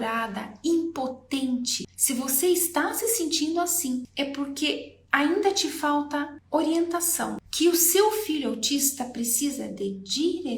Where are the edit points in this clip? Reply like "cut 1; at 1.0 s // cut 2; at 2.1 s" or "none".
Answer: cut 1; at 1.9 s // cut 2; at 4.1 s // cut 3; at 6.4 s // cut 4; at 7.4 s